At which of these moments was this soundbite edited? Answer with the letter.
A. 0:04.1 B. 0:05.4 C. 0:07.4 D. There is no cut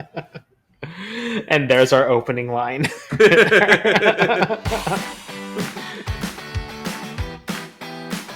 B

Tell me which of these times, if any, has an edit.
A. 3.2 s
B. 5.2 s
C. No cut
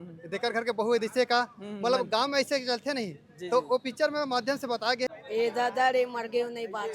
B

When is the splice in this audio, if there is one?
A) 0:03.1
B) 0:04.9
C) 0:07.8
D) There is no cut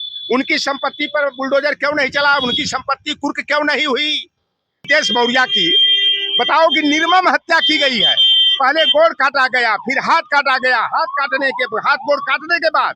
B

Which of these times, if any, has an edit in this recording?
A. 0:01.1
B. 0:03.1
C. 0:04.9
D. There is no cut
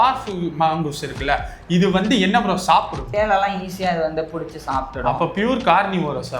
B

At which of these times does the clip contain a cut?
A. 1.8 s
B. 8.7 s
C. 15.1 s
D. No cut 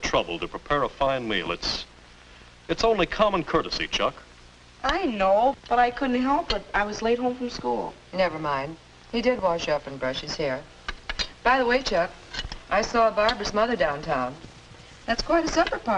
D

